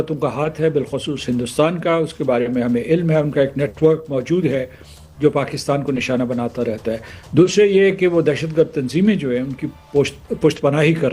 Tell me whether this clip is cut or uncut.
uncut